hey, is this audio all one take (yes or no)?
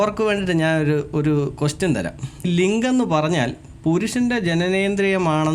no